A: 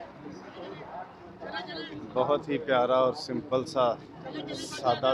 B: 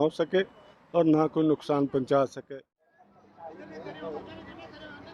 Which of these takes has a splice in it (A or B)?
B